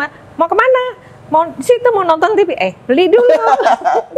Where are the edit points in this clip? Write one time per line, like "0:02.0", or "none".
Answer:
none